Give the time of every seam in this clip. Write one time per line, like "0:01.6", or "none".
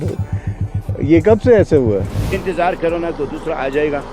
0:02.3